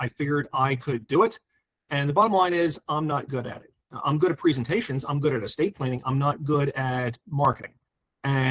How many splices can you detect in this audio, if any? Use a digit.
0